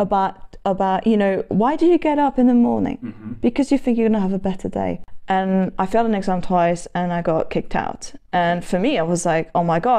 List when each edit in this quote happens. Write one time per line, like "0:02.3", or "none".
0:05.1

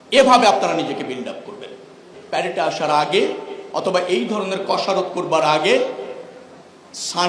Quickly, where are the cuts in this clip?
0:02.1

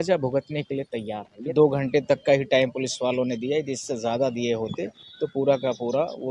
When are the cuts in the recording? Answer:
0:01.3

